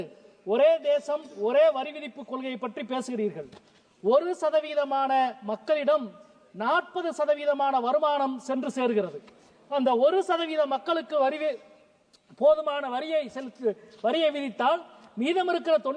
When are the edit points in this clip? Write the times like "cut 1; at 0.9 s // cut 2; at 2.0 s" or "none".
none